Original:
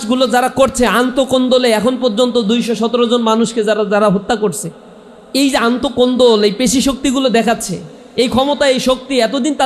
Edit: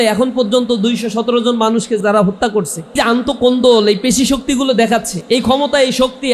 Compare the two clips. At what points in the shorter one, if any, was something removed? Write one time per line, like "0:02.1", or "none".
0:02.0
0:03.0
0:05.1